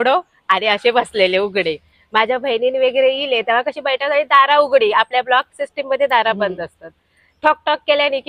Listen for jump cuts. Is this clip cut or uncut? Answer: uncut